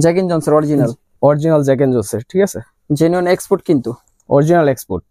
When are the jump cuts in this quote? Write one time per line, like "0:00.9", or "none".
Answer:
none